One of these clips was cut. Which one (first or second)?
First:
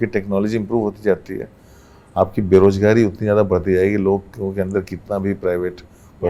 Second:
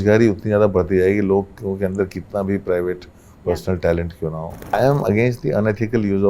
second